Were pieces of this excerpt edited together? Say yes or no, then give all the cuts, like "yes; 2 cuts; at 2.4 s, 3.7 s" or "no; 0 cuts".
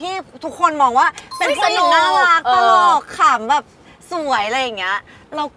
no; 0 cuts